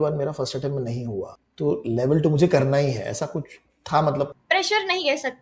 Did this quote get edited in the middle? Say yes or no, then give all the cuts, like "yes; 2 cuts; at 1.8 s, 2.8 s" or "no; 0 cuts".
yes; 2 cuts; at 1.4 s, 4.4 s